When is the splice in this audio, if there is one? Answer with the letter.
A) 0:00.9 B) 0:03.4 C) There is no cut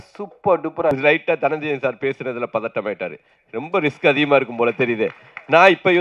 A